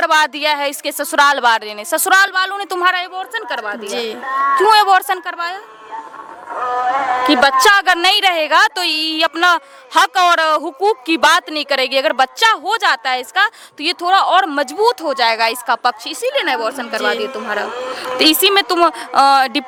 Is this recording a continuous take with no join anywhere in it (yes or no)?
yes